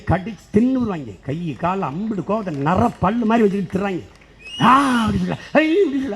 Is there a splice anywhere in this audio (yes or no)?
no